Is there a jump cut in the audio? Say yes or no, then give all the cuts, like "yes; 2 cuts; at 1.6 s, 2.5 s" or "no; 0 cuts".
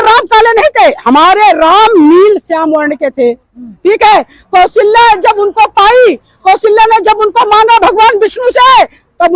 no; 0 cuts